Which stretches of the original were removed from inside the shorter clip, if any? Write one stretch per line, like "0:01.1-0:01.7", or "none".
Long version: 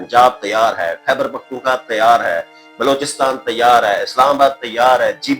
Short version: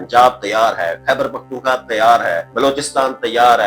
0:02.5-0:02.7